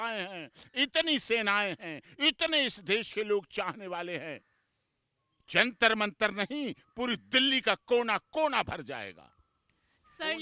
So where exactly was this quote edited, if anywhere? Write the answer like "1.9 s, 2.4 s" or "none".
none